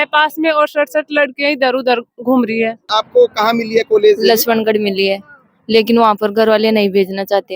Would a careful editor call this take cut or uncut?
cut